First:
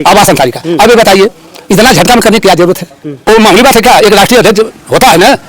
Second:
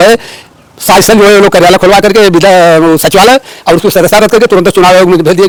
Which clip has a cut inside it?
first; 1 cut; at 3.2 s

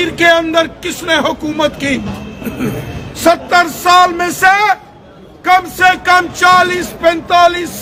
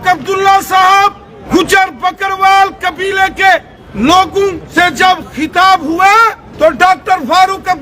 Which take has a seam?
second; 4 cuts; at 1.3 s, 3.8 s, 4.6 s, 6.4 s

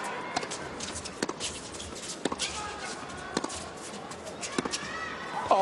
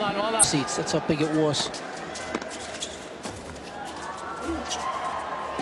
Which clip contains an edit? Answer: first; 1 cut; at 3.6 s

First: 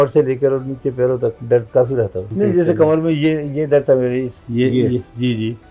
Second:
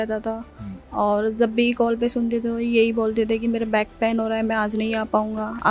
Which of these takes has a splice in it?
first; 3 cuts; at 1.4 s, 2.2 s, 4.4 s

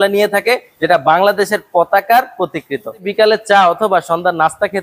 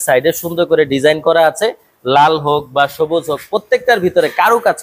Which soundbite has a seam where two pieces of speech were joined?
first; 1 cut; at 3.1 s

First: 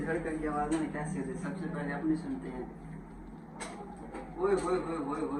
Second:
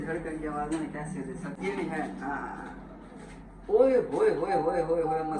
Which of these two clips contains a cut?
second; 1 cut; at 1.6 s

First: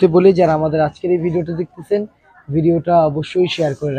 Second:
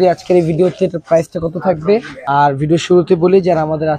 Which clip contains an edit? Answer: second; 1 cut; at 2.1 s

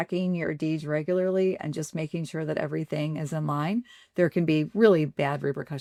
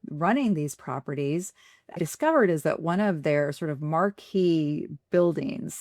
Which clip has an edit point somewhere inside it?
second; 1 cut; at 2.0 s

